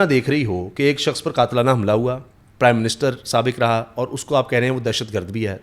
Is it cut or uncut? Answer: uncut